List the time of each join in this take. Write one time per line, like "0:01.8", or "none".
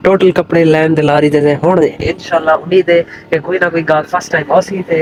none